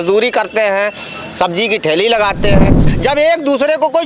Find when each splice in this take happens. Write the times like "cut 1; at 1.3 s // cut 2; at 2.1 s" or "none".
cut 1; at 2.8 s